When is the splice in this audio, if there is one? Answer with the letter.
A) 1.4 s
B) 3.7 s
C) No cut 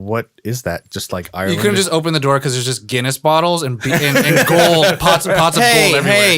A